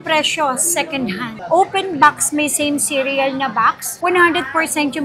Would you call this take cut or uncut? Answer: cut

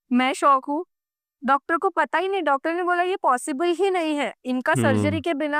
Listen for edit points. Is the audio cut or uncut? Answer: uncut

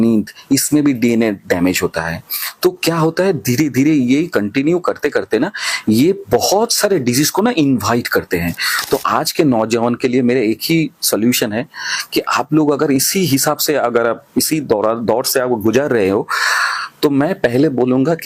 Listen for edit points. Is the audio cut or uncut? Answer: uncut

